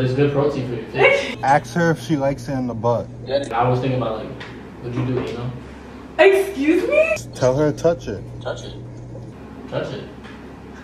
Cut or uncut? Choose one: cut